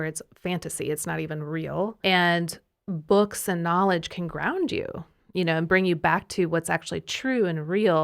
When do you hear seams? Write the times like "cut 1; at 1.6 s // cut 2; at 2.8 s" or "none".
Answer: cut 1; at 2.0 s